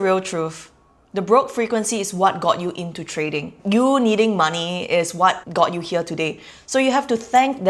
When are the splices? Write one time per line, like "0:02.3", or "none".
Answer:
0:03.5
0:05.4